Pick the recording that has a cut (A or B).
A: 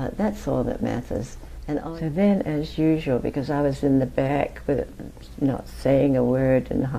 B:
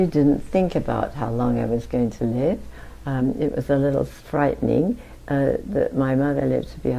A